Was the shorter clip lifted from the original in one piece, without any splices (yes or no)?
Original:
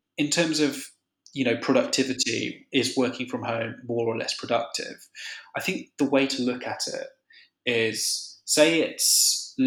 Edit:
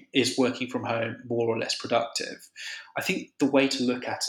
yes